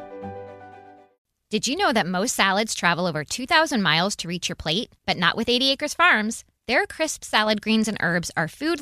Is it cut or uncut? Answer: cut